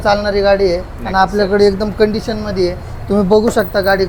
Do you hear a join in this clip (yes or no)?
no